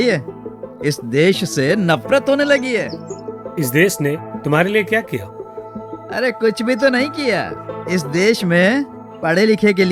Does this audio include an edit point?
no; 0 cuts

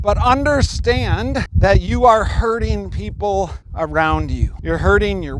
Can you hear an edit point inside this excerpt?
yes; 3 cuts; at 1.5 s, 3.6 s, 4.5 s

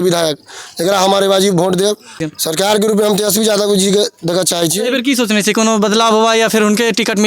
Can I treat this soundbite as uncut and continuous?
no; 2 cuts; at 2.2 s, 4.8 s

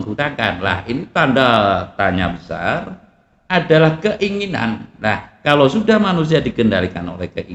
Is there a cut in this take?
no; 0 cuts

